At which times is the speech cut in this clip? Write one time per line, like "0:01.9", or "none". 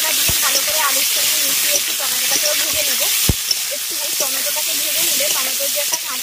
none